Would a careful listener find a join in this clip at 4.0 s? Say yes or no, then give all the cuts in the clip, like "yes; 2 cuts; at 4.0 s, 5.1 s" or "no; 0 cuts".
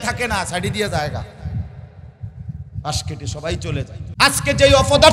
yes; 1 cut; at 4.0 s